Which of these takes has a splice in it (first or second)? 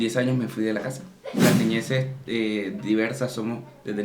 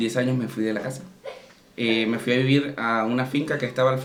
first